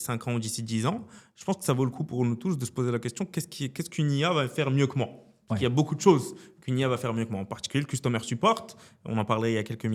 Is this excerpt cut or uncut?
uncut